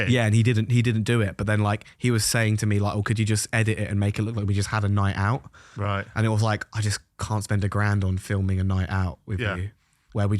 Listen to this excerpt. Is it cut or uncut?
uncut